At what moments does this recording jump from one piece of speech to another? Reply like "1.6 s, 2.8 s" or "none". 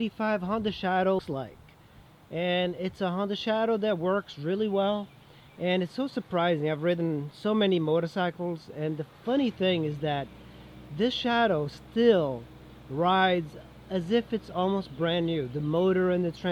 1.2 s